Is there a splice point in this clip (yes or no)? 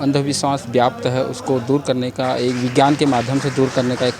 no